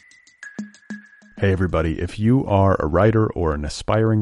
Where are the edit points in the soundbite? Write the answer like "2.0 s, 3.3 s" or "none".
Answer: 0.9 s